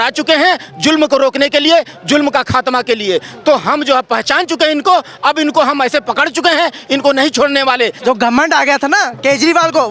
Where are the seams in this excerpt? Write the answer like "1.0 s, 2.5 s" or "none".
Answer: 8.0 s